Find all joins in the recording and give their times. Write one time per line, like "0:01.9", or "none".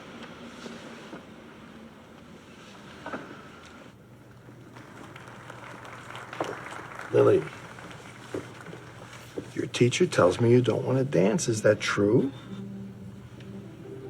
0:02.7